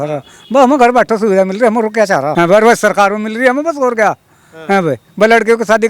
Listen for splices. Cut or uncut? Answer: cut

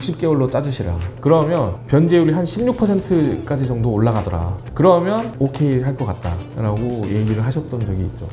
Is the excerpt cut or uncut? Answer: cut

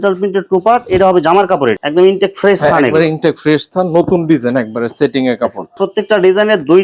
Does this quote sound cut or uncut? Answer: cut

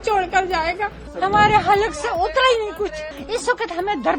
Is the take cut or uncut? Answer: cut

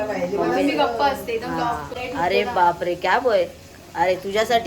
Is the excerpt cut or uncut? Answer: cut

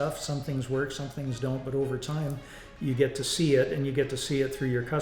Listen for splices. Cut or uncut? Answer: uncut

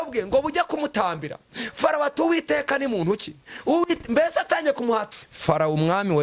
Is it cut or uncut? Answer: cut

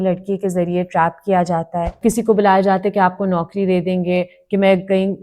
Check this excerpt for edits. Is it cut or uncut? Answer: cut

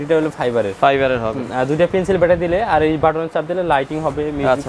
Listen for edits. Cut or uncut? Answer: uncut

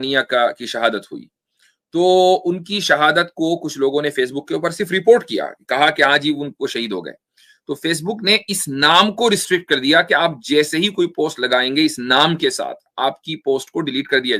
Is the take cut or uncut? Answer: uncut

